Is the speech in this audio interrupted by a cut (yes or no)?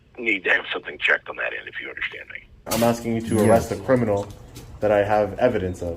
yes